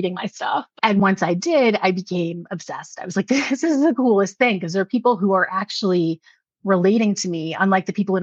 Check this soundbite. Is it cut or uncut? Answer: uncut